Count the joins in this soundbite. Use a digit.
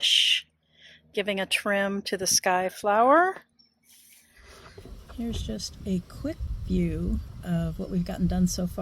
1